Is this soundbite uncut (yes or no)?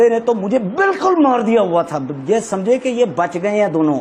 yes